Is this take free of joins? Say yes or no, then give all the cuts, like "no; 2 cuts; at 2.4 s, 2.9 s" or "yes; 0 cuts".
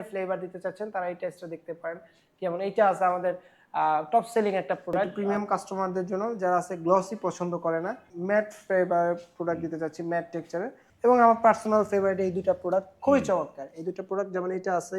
no; 3 cuts; at 5.1 s, 8.1 s, 10.8 s